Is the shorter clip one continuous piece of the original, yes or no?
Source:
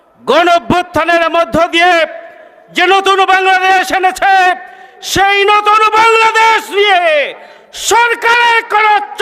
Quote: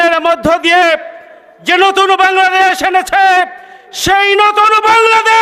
yes